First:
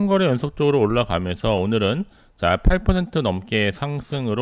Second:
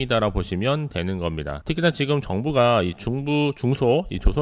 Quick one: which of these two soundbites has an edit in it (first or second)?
second